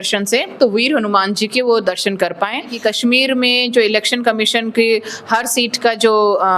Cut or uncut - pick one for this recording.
cut